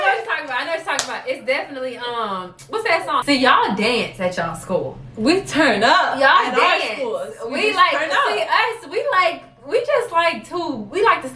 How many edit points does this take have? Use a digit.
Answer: 1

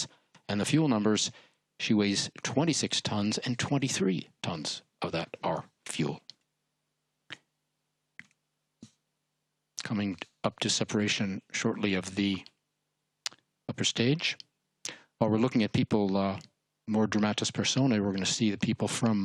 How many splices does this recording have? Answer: 0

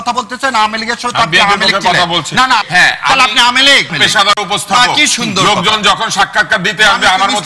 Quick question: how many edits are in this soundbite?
2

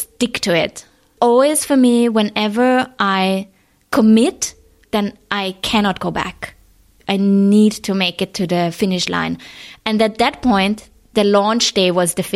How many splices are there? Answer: 3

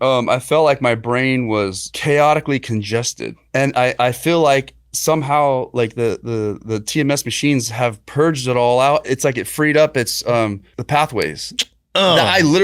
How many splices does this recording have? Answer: 4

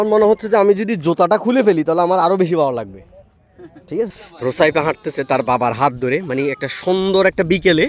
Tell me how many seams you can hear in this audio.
1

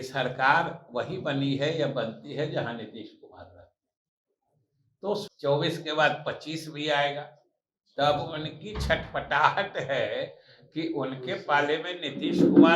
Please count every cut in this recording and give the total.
1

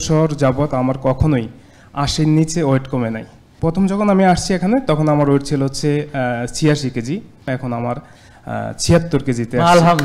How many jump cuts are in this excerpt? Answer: 2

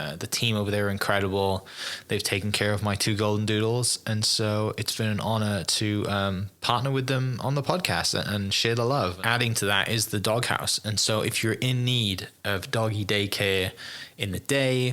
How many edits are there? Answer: 1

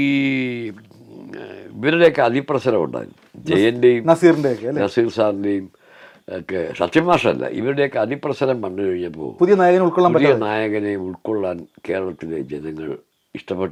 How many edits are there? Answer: 0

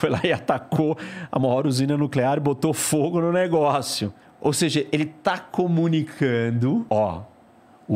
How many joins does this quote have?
2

